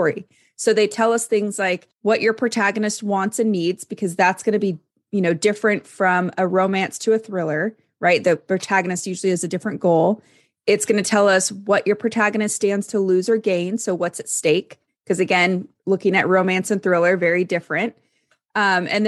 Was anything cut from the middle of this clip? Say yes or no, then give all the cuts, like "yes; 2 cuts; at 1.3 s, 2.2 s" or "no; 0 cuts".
yes; 1 cut; at 1.9 s